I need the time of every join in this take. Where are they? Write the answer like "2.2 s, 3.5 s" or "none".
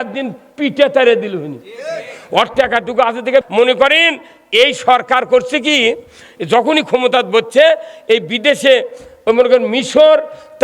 3.5 s